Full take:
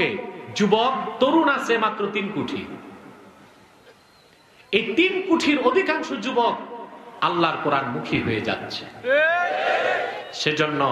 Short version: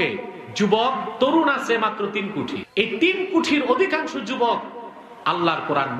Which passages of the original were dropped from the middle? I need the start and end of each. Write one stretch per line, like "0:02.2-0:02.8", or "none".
0:02.6-0:04.6